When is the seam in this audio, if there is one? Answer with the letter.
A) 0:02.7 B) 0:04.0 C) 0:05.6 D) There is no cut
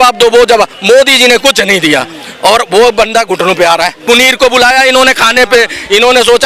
B